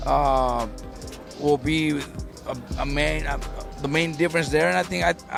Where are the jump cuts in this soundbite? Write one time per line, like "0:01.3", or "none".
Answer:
none